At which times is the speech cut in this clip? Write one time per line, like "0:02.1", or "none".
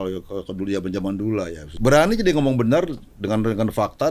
0:01.6
0:03.1

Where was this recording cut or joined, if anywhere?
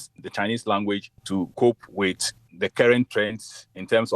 0:01.2

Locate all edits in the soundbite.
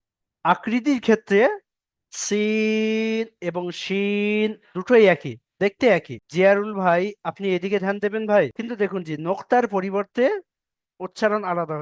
0:08.6

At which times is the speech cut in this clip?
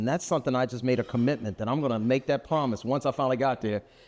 none

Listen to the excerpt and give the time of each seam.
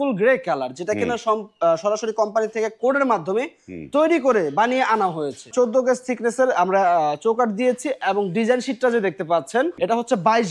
0:05.5
0:09.7

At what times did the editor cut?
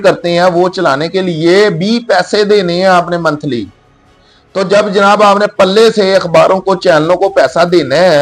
none

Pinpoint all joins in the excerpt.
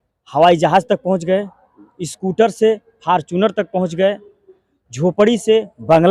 none

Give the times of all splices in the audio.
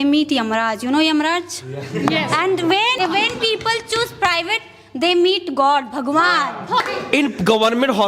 0:03.0
0:06.9

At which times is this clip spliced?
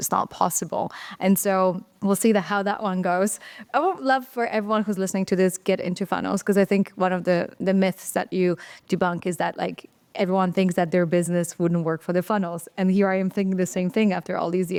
none

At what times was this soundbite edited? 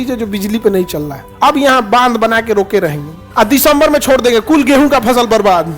0:01.3
0:03.3

